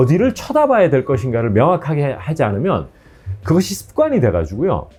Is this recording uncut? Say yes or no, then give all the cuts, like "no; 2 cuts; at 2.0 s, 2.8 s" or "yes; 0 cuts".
yes; 0 cuts